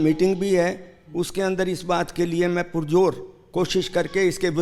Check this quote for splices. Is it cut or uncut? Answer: uncut